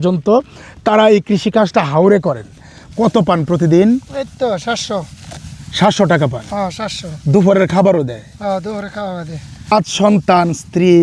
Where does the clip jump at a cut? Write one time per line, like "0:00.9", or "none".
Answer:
0:02.9
0:09.7